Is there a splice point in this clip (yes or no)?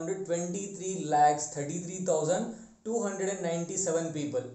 no